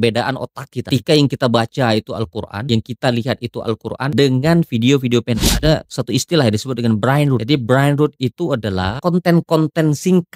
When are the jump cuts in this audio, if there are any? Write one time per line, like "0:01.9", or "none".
0:00.9
0:02.6
0:04.1
0:05.6
0:07.4
0:09.0